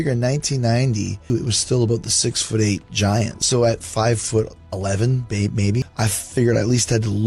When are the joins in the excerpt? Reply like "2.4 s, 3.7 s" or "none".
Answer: 1.3 s, 3.4 s, 5.9 s